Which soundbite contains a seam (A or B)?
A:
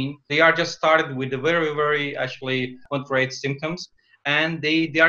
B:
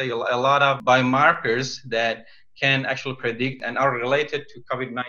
B